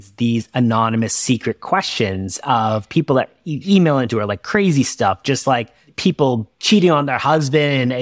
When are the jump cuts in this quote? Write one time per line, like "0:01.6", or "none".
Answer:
0:06.2